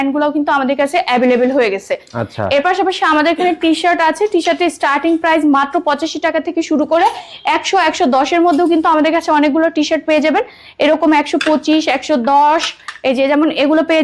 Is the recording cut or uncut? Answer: uncut